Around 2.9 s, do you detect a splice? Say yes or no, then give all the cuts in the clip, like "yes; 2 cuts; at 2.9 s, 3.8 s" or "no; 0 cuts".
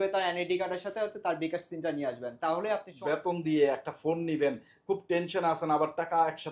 yes; 1 cut; at 2.9 s